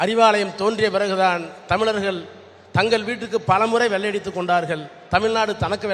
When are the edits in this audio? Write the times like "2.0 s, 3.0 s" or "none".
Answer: none

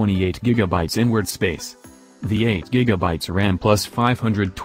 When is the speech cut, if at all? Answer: 0.9 s

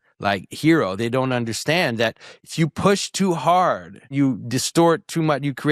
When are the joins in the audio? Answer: 4.0 s

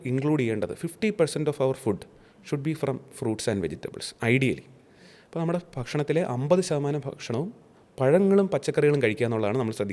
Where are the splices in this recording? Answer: none

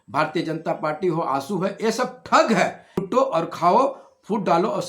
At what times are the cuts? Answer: 3.1 s

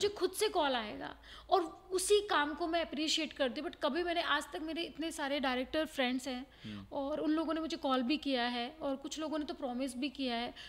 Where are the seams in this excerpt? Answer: none

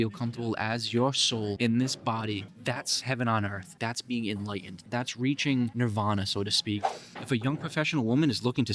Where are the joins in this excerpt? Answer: 1.5 s, 2.5 s, 3.8 s, 4.8 s, 5.7 s, 6.9 s

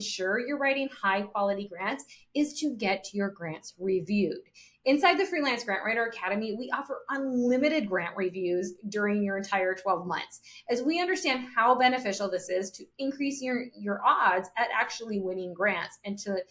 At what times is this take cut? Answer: none

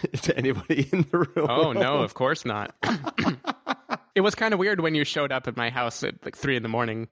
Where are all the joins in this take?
3.9 s

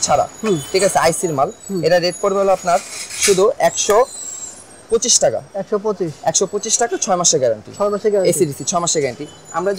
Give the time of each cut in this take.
none

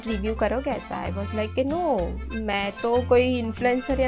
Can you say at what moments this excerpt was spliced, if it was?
none

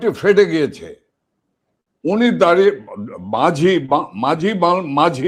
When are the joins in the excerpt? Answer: none

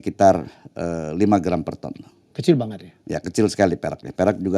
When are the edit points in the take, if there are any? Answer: none

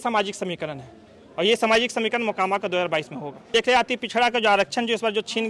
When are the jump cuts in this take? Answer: 3.5 s

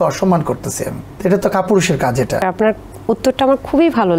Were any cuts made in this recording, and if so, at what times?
1.0 s, 2.4 s

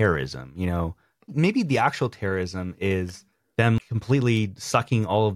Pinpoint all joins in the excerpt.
1.3 s, 3.8 s

